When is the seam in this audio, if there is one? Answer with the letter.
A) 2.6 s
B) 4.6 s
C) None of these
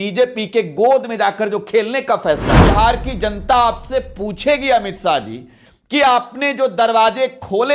A